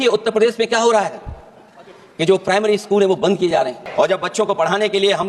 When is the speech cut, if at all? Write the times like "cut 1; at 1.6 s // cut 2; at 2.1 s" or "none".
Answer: cut 1; at 3.8 s